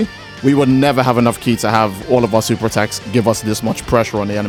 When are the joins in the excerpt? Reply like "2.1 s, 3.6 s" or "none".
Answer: none

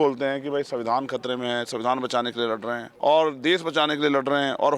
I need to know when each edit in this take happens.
2.9 s

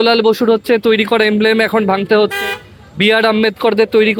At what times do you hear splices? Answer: none

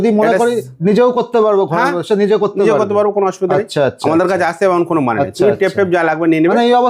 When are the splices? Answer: none

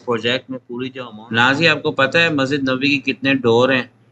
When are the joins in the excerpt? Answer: 1.0 s

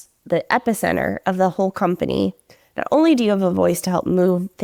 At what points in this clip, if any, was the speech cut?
none

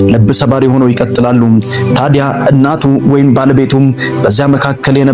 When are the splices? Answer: none

